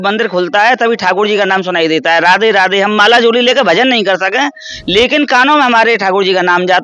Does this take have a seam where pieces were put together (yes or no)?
no